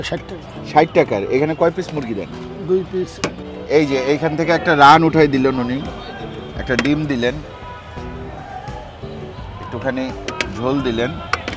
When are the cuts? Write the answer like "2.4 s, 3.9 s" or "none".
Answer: 3.5 s